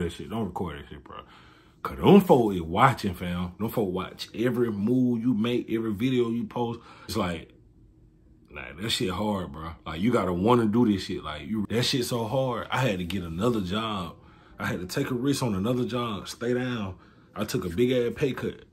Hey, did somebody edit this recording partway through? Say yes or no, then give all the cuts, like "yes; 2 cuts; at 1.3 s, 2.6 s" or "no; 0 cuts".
yes; 2 cuts; at 7.1 s, 11.6 s